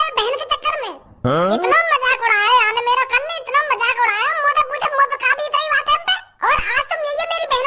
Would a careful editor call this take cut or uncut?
cut